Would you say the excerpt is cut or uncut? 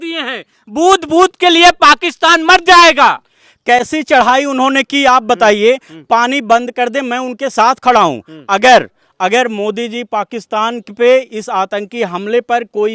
uncut